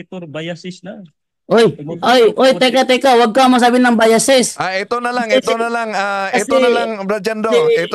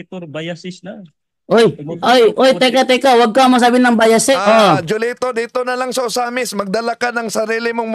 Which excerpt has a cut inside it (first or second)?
second